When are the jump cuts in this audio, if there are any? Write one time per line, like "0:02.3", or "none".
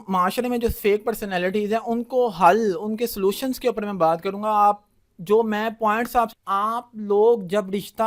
0:06.4